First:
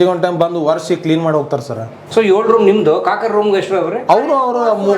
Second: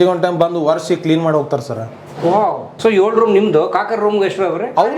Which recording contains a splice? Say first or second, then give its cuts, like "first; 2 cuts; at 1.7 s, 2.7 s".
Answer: first; 1 cut; at 2.0 s